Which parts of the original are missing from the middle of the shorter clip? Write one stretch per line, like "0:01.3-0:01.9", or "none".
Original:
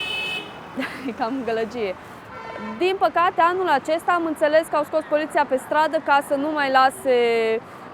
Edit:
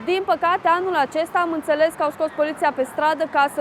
none